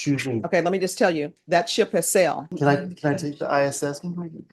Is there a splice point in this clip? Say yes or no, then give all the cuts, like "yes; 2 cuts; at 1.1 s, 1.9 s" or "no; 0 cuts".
yes; 1 cut; at 2.5 s